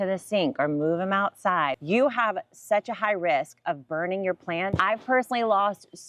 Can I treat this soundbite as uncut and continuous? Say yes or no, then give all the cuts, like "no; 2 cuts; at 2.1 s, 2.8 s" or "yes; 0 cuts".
no; 2 cuts; at 1.8 s, 4.7 s